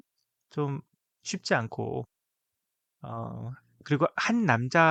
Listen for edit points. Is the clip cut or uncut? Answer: uncut